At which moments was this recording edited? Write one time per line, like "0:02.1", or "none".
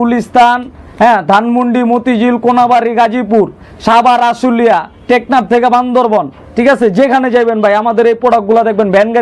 none